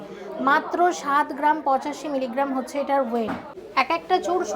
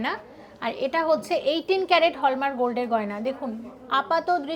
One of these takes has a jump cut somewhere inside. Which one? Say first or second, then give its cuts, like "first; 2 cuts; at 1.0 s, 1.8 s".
first; 1 cut; at 3.5 s